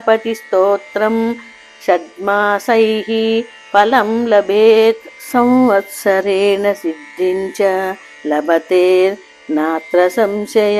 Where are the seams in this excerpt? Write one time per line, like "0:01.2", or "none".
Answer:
0:05.1